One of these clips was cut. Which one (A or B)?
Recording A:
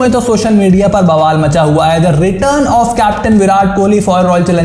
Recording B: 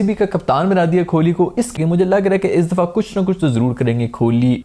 B